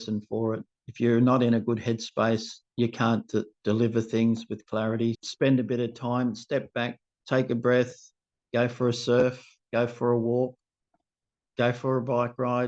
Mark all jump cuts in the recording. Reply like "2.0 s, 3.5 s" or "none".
5.2 s, 11.4 s